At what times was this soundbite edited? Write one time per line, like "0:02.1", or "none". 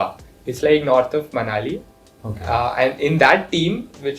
none

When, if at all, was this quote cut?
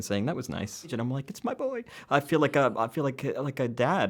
0:00.9

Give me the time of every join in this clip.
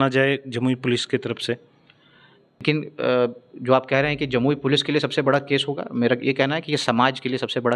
0:02.6

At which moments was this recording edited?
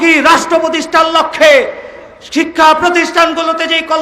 none

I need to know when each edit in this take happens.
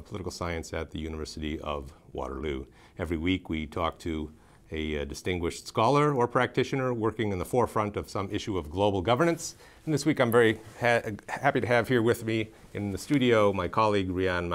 0:13.5

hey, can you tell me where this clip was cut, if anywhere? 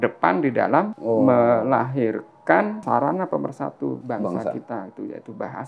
0:01.0
0:02.8
0:04.0

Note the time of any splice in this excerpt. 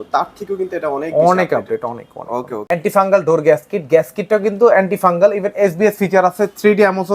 0:02.6

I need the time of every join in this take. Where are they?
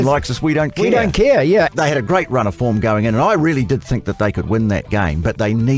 0:01.7

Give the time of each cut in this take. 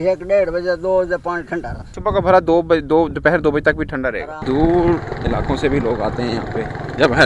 0:01.9
0:04.3

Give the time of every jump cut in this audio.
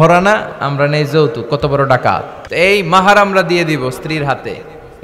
0:02.4

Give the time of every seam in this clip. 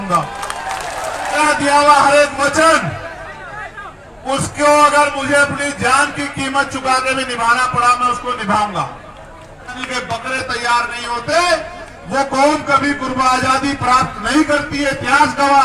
0:01.4
0:09.9

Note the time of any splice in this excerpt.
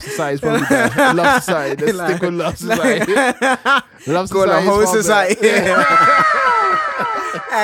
none

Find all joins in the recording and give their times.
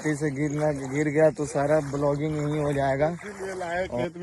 0:03.3

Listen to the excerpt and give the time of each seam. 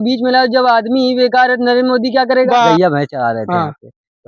0:02.7

